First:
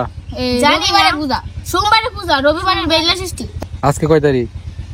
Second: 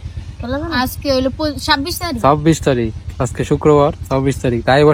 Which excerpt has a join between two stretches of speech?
first; 1 cut; at 3.4 s

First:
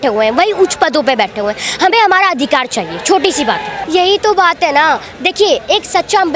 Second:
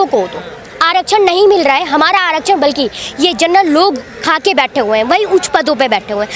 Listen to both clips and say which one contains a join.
first; 1 cut; at 3.8 s

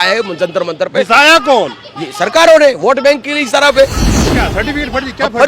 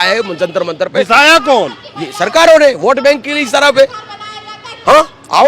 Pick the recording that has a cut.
first; 1 cut; at 4.4 s

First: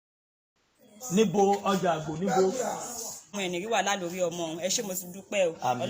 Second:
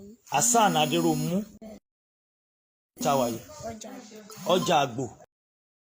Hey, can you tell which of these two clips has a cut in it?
first; 1 cut; at 3.4 s

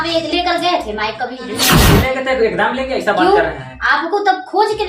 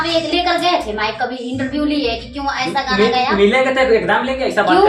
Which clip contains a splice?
first; 1 cut; at 1.8 s

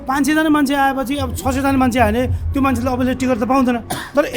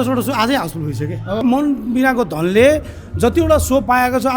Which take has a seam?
second; 1 cut; at 1.4 s

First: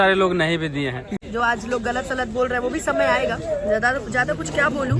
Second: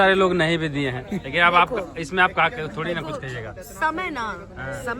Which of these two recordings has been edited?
first; 1 cut; at 1.2 s

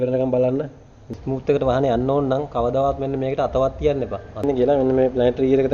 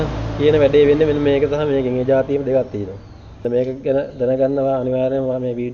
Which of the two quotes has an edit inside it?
first; 2 cuts; at 1.1 s, 4.4 s

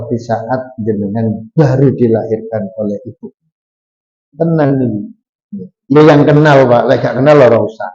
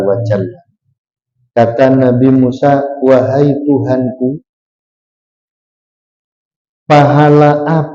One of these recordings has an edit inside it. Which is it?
first; 1 cut; at 4.3 s

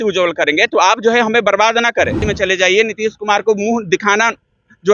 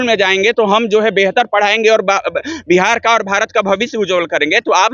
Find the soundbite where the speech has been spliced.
first; 1 cut; at 2.2 s

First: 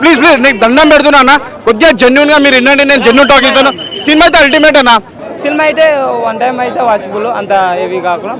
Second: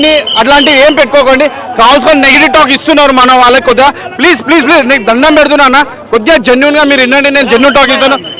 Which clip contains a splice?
first; 1 cut; at 5.2 s

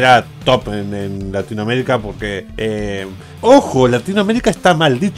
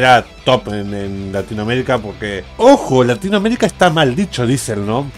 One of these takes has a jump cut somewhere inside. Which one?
second; 1 cut; at 2.4 s

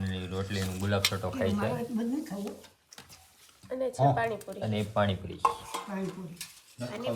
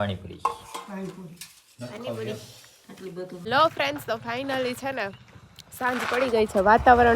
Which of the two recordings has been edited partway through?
second; 1 cut; at 3.4 s

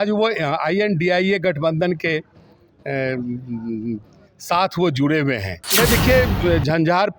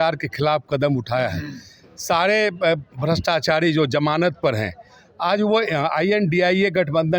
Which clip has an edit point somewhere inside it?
first; 1 cut; at 5.6 s

